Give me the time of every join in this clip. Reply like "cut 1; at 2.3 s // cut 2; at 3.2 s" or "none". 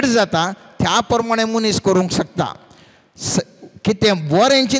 none